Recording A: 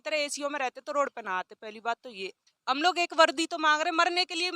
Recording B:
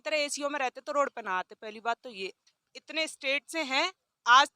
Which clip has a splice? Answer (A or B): B